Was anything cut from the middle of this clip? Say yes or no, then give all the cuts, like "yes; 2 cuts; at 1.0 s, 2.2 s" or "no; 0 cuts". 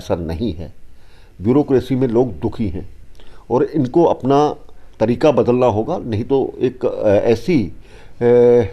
no; 0 cuts